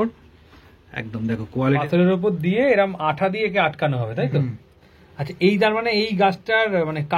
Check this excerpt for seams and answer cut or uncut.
cut